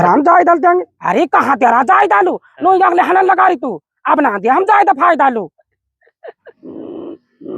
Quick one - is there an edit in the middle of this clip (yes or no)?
yes